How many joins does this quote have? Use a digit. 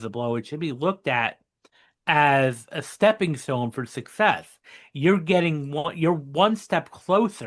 0